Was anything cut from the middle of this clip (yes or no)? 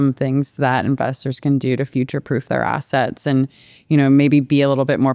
no